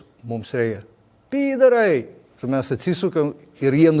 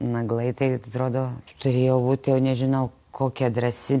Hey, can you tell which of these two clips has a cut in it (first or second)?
second